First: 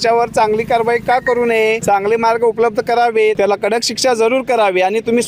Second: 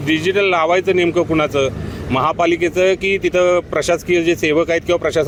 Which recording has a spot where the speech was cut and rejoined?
first; 2 cuts; at 1.8 s, 3.4 s

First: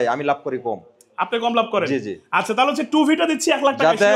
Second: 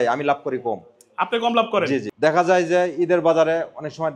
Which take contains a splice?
second; 1 cut; at 2.1 s

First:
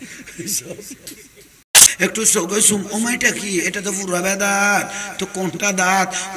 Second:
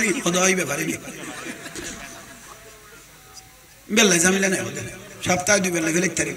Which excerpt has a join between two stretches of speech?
first; 1 cut; at 1.9 s

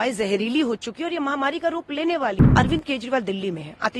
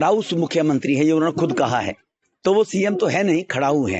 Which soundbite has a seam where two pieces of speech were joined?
first; 1 cut; at 2.4 s

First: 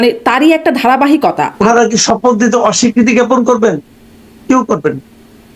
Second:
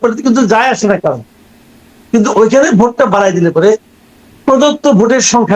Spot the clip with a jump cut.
first; 1 cut; at 1.5 s

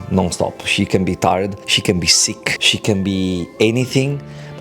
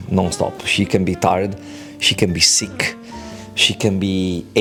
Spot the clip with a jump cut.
first; 2 cuts; at 1.7 s, 2.6 s

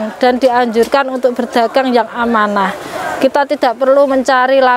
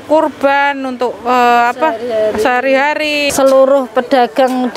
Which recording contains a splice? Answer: second; 1 cut; at 3.3 s

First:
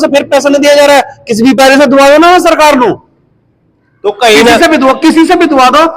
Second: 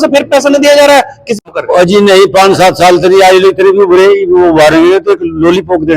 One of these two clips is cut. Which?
second; 1 cut; at 1.4 s

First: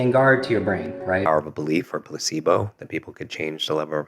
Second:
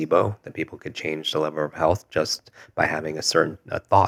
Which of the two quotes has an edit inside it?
first; 1 cut; at 1.2 s

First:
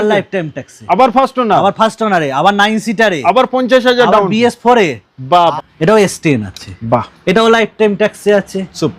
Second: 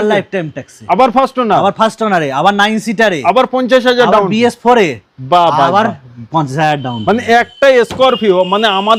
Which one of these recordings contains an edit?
first; 1 cut; at 5.5 s

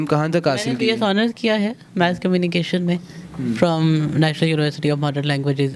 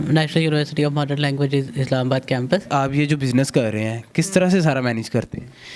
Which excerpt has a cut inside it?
second; 1 cut; at 2.7 s

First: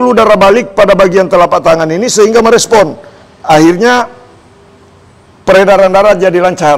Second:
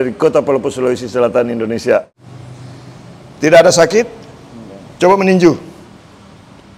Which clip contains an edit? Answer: second; 1 cut; at 2.1 s

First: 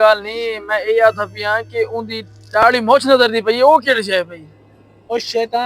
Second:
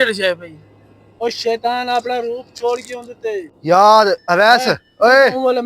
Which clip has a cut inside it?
second; 1 cut; at 3.5 s

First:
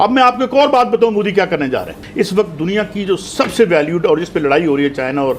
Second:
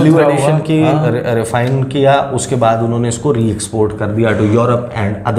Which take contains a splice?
first; 1 cut; at 2.0 s

